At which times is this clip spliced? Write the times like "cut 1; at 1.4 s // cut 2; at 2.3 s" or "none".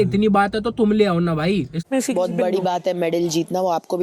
cut 1; at 1.8 s